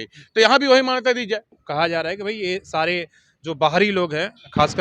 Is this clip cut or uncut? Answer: cut